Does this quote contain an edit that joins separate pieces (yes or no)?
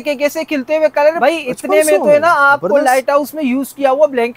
yes